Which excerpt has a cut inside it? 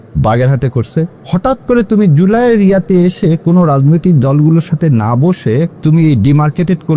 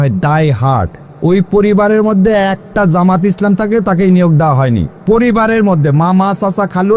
first; 2 cuts; at 1.2 s, 5.7 s

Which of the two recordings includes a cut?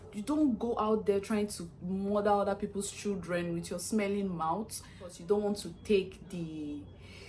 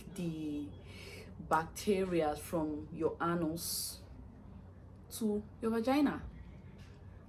first; 1 cut; at 5.2 s

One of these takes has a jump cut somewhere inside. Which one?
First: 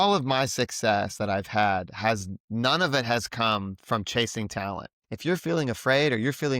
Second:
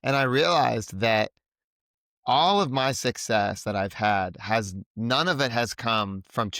first; 1 cut; at 5.0 s

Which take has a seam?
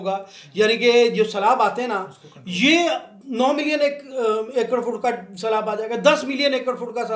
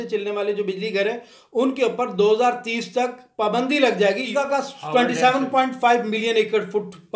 second; 1 cut; at 4.3 s

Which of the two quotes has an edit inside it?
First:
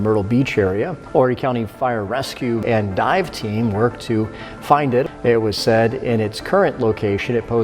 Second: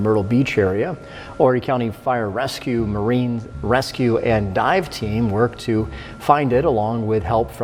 first; 3 cuts; at 1.0 s, 2.6 s, 5.0 s

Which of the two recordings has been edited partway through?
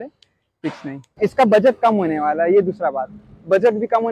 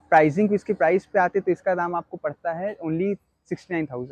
first; 1 cut; at 1.1 s

